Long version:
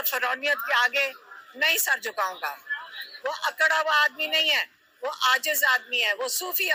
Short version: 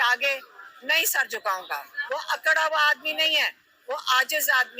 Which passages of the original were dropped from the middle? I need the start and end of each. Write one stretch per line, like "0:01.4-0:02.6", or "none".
0:02.7-0:03.1